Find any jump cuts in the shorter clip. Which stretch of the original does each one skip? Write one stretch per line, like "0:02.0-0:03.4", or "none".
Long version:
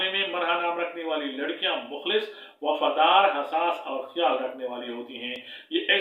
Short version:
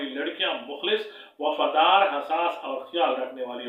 none